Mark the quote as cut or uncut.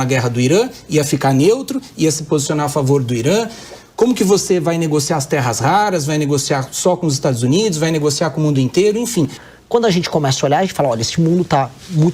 cut